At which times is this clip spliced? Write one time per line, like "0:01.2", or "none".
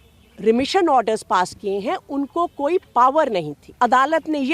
0:03.6